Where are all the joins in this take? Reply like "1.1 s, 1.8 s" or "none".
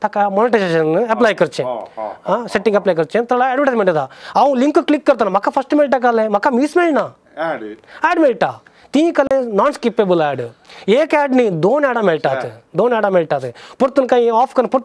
none

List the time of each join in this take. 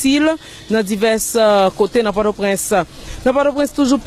2.6 s

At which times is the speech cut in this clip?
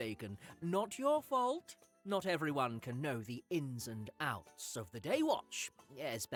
none

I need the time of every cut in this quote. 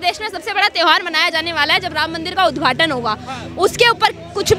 none

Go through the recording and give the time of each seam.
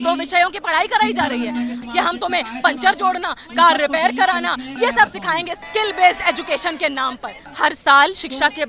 1.8 s, 4.7 s, 5.6 s, 7.4 s

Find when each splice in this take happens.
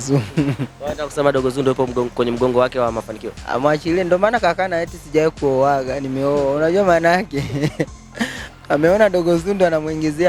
none

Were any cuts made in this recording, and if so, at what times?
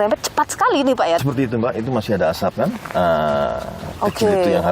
1.2 s

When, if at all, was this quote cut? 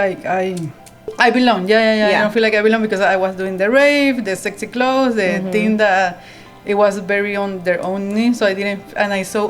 1.1 s

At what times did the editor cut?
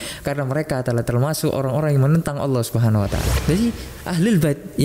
3.4 s

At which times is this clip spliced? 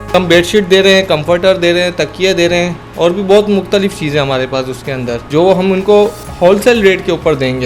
5.2 s

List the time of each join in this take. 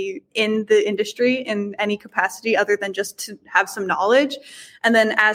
none

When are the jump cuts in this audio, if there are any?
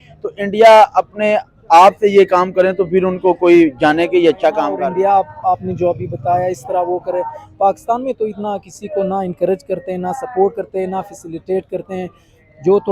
4.6 s

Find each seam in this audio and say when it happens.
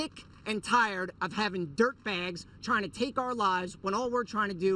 none

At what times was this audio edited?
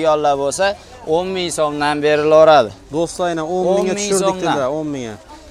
none

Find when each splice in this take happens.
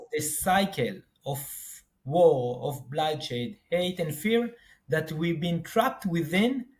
none

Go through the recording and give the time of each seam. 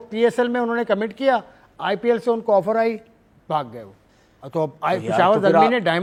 none

